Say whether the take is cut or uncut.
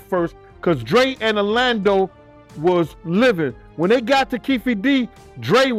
uncut